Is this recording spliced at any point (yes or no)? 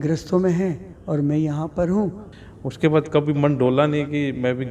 yes